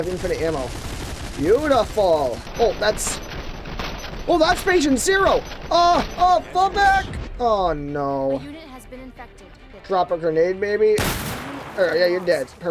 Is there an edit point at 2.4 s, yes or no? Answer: yes